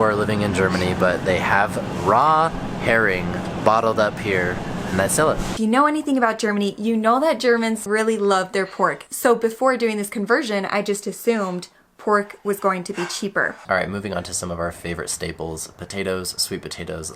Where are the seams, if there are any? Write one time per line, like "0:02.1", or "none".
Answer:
0:05.5
0:07.8
0:09.0
0:13.6